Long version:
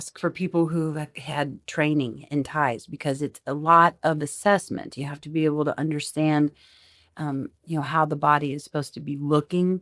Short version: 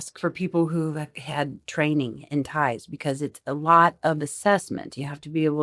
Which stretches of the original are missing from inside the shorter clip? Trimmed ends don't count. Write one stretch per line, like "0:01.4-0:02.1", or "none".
none